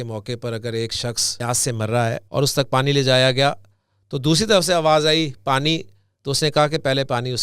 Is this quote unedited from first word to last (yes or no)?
no